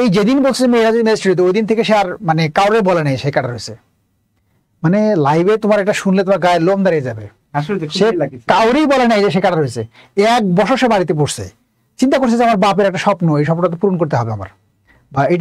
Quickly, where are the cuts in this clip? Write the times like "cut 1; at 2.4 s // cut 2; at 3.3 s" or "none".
none